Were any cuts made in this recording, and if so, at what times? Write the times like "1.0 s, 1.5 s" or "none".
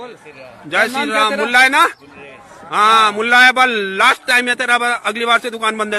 none